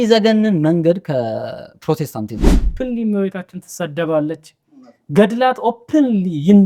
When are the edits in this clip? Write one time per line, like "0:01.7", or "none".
0:02.7